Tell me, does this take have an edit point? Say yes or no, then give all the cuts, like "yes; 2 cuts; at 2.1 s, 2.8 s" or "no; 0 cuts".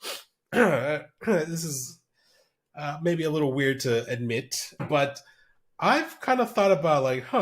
yes; 1 cut; at 4.8 s